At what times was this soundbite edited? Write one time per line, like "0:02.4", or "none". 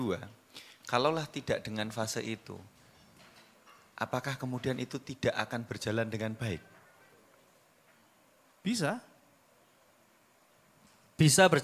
none